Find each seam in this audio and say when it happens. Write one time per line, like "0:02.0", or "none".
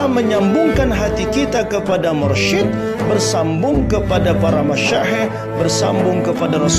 none